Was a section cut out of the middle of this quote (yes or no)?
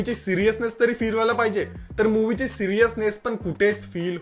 no